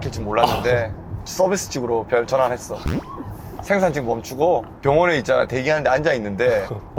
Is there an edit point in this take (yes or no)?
yes